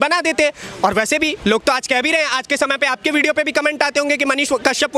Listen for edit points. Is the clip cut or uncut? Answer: uncut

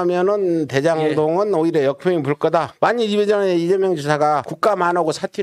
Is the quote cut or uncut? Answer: cut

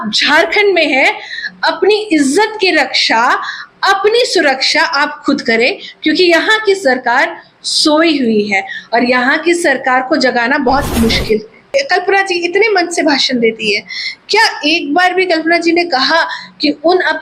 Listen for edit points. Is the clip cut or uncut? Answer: cut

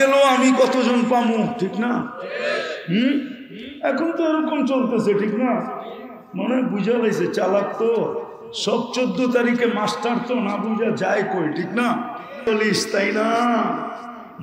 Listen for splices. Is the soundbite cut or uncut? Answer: cut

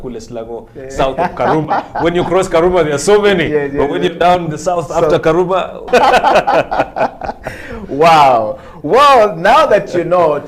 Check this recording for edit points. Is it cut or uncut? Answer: cut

